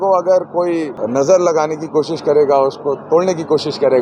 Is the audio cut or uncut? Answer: cut